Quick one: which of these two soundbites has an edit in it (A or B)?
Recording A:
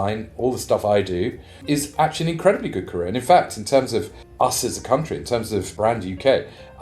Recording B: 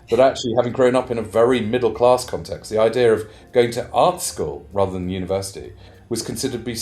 A